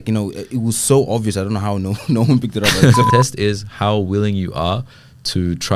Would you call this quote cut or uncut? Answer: cut